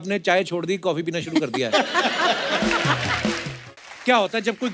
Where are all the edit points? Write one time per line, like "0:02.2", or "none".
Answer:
0:03.5

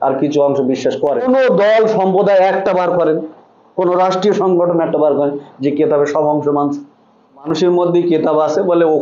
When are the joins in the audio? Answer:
0:01.2
0:07.5

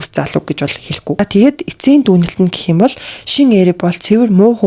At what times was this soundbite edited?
0:01.1

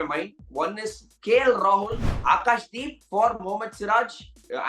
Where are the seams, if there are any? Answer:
0:02.1

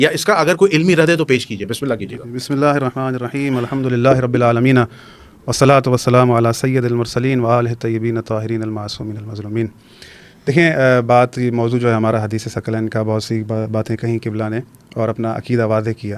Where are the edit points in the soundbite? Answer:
none

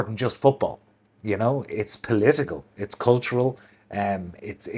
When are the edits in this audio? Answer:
none

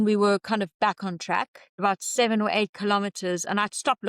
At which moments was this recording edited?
0:01.8

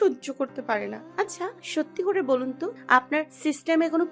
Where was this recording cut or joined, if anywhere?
0:01.6
0:03.1

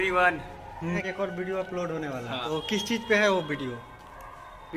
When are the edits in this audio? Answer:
0:01.0
0:02.4

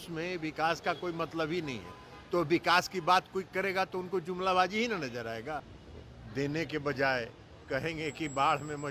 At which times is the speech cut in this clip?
0:05.8

